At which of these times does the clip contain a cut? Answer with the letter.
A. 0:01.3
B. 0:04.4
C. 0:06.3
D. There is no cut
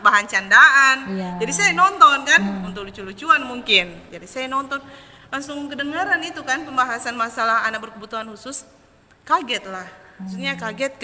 D